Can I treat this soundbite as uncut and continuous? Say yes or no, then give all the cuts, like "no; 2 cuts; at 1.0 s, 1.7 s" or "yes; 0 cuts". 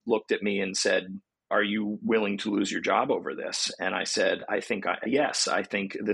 no; 1 cut; at 1.2 s